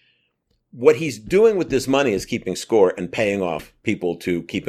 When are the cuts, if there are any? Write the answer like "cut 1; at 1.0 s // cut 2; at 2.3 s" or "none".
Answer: cut 1; at 3.7 s